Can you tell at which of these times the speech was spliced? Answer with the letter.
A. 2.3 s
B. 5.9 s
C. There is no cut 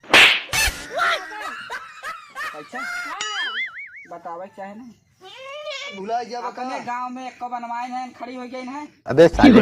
B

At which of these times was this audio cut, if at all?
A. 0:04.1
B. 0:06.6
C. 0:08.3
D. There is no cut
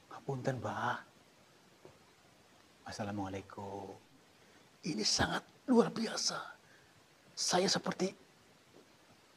A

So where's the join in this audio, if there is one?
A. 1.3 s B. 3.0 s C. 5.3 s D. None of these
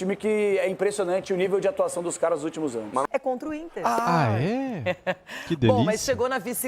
B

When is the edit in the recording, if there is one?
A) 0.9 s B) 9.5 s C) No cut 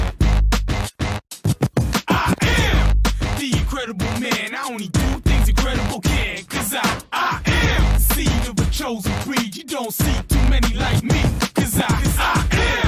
A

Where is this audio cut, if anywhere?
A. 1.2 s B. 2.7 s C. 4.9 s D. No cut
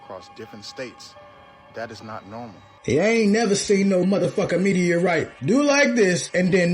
B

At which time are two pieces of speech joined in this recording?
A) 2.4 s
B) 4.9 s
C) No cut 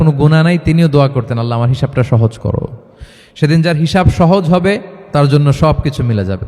B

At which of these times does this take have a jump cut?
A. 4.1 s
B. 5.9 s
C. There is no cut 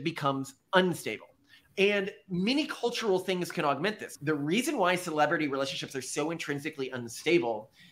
A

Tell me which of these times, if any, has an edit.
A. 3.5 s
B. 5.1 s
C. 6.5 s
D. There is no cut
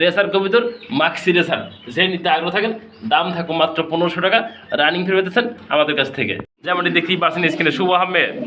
C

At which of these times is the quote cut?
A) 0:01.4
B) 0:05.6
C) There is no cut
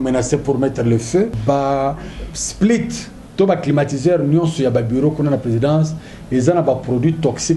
A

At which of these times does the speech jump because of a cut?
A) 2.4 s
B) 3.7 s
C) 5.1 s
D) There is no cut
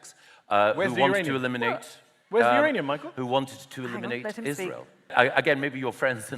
C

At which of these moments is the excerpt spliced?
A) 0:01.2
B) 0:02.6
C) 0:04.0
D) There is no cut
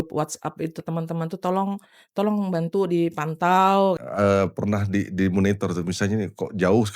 C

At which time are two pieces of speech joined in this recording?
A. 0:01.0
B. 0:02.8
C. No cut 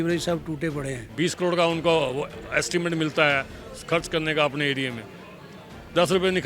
A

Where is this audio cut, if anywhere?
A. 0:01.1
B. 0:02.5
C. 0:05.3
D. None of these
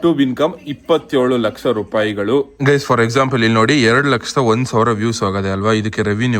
B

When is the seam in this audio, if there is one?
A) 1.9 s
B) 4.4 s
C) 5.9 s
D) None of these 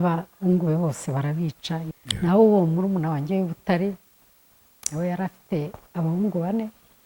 A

